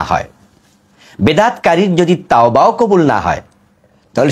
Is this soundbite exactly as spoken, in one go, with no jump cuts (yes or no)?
yes